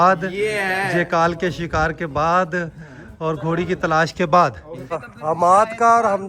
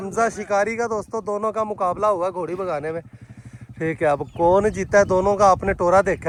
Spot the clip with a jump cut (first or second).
first